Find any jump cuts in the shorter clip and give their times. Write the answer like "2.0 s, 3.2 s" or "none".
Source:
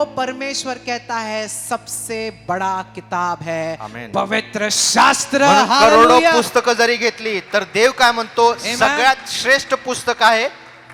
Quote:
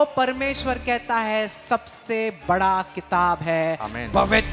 none